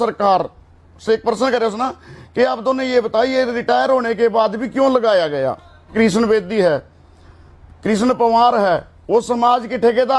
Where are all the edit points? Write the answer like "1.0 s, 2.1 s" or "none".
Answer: 5.9 s

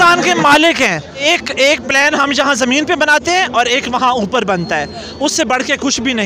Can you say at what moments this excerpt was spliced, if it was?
1.2 s

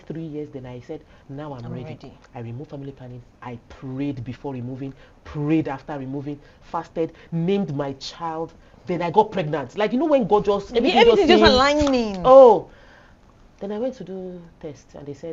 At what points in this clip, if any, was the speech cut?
none

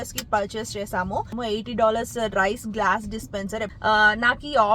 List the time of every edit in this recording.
1.4 s, 3.7 s

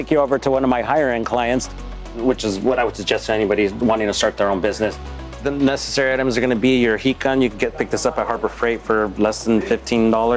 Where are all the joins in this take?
2.2 s, 5.4 s

